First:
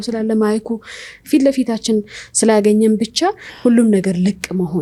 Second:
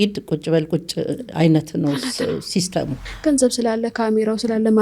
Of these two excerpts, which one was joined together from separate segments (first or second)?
second